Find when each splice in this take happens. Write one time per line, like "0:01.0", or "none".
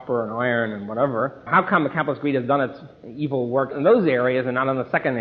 none

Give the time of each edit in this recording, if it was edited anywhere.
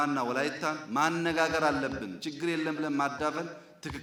none

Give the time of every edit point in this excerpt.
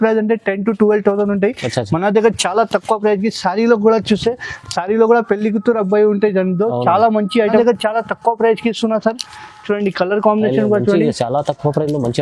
0:07.6

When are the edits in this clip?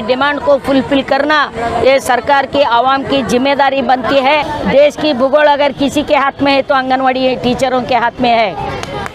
0:04.5

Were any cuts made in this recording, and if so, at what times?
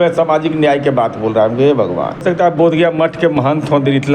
0:02.2

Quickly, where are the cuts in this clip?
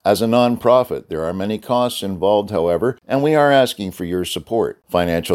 0:03.0

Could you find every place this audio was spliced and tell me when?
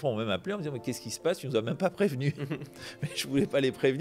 none

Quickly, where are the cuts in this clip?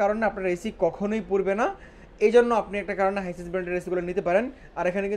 none

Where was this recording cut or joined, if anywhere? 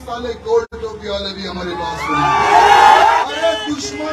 0:03.2

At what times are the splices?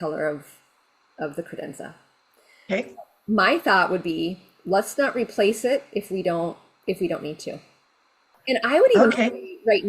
0:08.3

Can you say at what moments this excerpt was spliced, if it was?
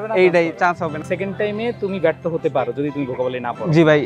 0:01.0

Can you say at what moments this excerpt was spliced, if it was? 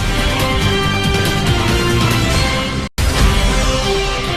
none

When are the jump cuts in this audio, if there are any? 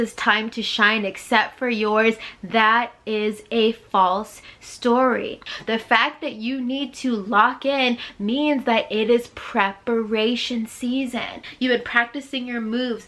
0:05.5
0:11.4

